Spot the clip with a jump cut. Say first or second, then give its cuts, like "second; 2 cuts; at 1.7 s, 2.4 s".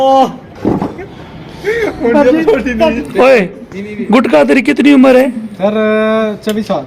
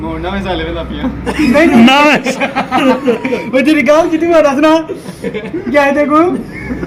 first; 1 cut; at 3.0 s